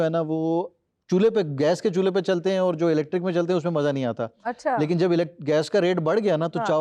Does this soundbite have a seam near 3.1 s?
no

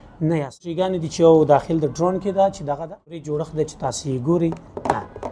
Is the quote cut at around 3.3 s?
yes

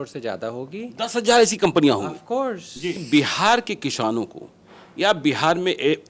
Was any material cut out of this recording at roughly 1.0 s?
no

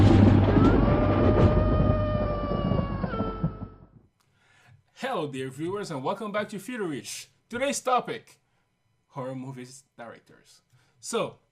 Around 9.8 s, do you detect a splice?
no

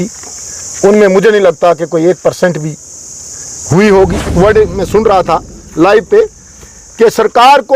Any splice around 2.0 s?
no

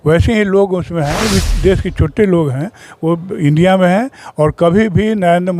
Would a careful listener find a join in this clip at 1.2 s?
yes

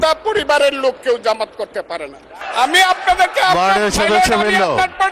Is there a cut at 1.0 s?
no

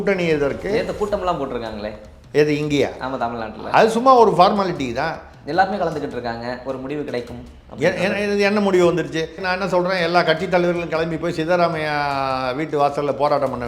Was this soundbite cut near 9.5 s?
yes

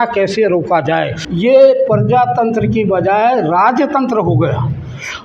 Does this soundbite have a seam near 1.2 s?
yes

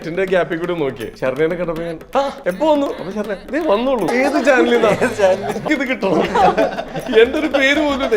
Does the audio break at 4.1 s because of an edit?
yes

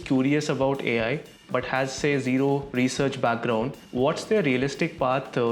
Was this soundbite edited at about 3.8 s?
yes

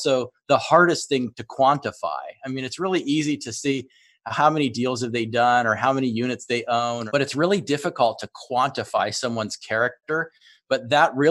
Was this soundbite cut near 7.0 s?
yes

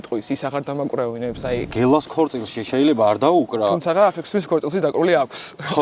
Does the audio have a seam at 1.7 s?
yes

